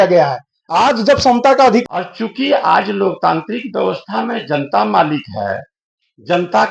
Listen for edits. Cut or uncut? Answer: cut